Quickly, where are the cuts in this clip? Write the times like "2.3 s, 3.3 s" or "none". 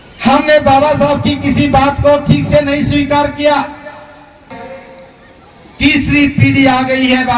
4.6 s